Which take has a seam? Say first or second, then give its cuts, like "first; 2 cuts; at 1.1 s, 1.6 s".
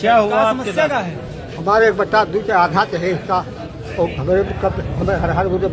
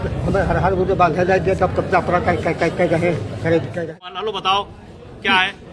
second; 1 cut; at 3.9 s